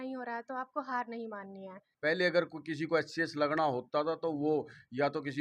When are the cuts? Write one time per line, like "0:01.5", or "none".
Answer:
0:01.8